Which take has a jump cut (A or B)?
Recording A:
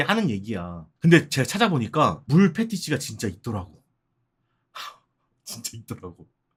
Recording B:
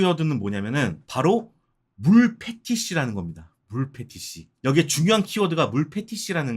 B